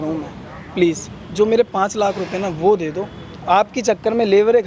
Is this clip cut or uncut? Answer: uncut